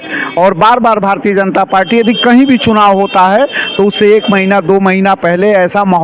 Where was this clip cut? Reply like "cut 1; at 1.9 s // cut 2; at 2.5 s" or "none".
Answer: none